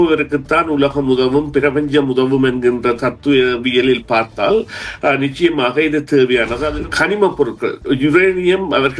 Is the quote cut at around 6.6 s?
yes; 1 cut; at 6.6 s

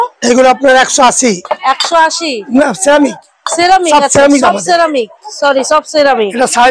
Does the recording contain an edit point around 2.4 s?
yes; 1 cut; at 2.4 s

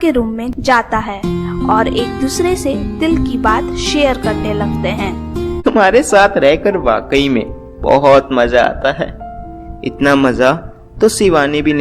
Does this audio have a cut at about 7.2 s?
no; 1 cut; at 5.6 s

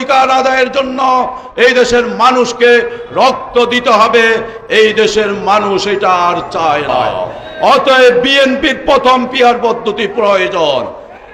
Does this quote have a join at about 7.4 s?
yes; 1 cut; at 7.4 s

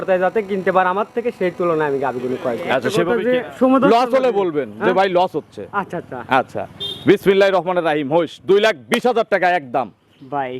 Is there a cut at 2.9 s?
yes; 1 cut; at 2.9 s

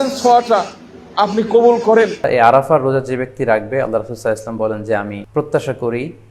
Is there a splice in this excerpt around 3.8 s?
no; 2 cuts; at 2.3 s, 5.2 s

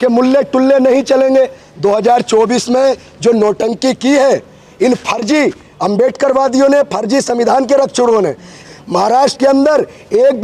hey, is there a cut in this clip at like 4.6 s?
no; 2 cuts; at 1.6 s, 8.6 s

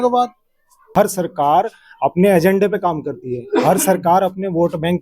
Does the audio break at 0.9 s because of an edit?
yes; 1 cut; at 0.9 s

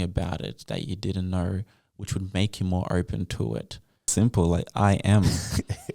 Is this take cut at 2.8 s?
no; 1 cut; at 4.1 s

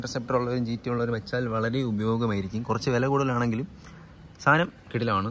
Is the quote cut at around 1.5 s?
no; 0 cuts

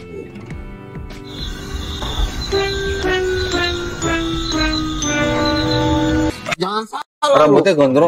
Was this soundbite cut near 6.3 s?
yes; 1 cut; at 6.3 s

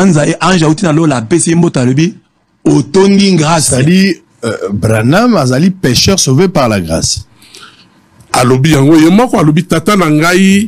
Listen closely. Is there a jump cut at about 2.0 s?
no; 1 cut; at 3.7 s

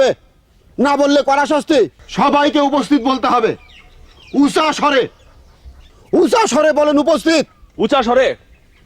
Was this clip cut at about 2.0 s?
yes; 1 cut; at 2.0 s

